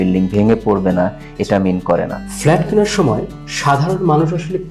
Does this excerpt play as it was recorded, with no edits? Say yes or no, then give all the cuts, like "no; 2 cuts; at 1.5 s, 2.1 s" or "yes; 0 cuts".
no; 1 cut; at 2.2 s